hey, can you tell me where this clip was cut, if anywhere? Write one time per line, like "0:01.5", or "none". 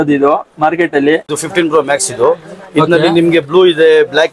0:01.4